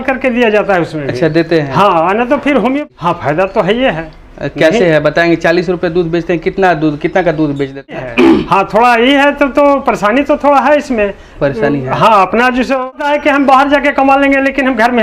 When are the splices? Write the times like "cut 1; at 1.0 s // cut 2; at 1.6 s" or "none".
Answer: cut 1; at 2.8 s // cut 2; at 8.0 s // cut 3; at 12.9 s